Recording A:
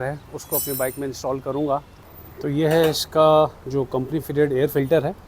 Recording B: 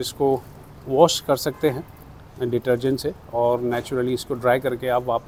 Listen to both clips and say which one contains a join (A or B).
A